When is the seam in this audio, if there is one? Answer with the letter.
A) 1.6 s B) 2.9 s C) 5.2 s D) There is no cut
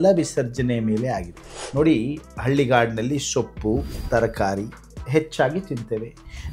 A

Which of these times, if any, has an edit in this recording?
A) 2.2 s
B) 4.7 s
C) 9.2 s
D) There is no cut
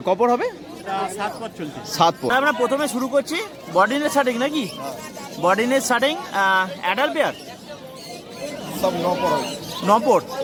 D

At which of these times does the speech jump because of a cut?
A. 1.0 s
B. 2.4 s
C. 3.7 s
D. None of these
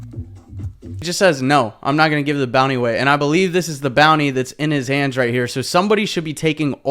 A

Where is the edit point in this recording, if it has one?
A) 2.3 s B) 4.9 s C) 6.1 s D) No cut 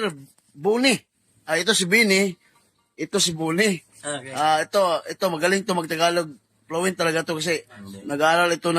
B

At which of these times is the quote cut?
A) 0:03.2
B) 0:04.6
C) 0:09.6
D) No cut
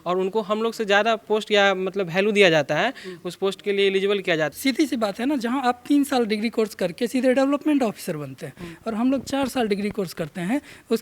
B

